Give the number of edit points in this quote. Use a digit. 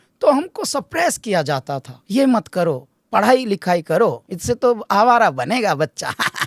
2